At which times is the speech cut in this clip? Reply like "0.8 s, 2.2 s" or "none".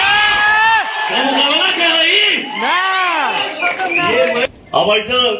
4.5 s